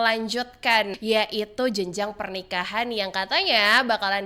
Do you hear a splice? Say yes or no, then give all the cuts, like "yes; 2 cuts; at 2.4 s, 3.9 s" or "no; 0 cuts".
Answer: yes; 1 cut; at 0.9 s